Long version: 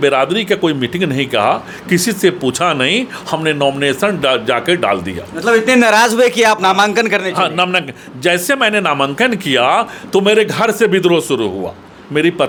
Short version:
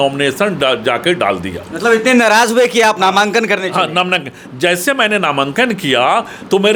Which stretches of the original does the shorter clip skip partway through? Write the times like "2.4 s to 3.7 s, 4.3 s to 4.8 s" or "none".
none